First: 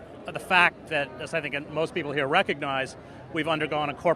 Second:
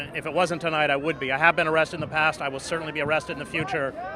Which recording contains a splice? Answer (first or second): first